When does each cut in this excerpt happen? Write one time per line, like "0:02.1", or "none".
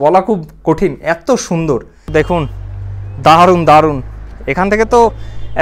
0:02.1

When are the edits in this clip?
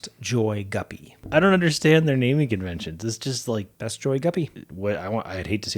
0:03.7
0:04.6

